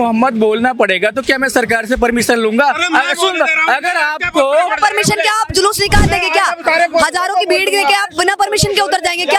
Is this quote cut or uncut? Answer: uncut